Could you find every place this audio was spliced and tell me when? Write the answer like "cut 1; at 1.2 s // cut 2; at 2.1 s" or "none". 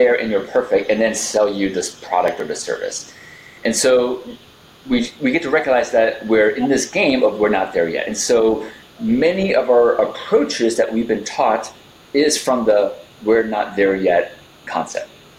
none